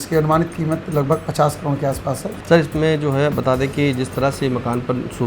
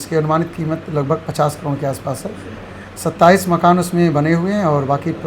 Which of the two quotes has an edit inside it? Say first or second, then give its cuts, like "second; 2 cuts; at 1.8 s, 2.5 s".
first; 1 cut; at 2.3 s